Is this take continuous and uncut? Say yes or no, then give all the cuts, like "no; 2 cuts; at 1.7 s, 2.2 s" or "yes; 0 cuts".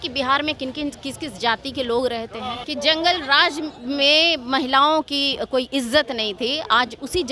no; 1 cut; at 2.6 s